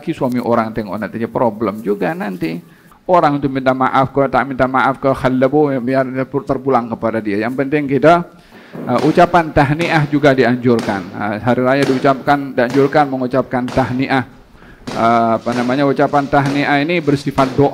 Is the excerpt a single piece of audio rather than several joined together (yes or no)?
no